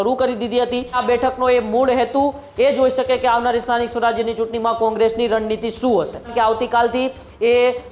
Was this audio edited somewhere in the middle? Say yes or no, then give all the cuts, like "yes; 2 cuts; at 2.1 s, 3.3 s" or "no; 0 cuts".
yes; 2 cuts; at 1.0 s, 6.3 s